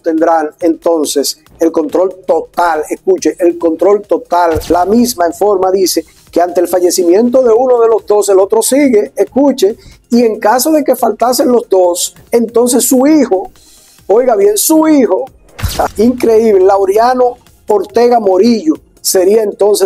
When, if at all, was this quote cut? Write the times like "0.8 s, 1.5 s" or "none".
4.6 s, 15.9 s